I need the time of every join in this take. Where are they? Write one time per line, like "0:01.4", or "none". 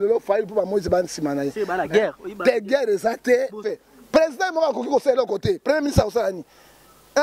0:03.6